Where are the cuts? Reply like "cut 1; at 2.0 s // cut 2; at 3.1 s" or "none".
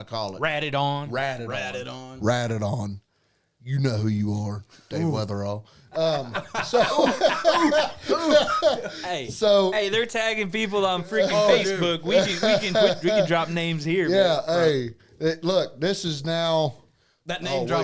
none